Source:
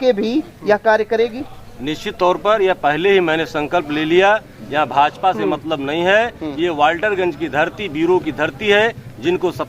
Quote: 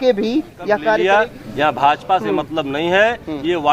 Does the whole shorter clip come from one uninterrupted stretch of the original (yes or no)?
no